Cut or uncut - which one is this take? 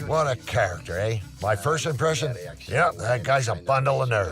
cut